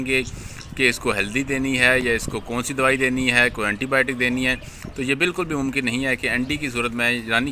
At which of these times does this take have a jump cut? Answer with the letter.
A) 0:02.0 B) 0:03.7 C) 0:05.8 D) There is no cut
D